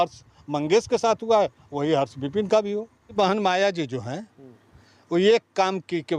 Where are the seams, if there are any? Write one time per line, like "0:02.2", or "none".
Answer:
0:03.1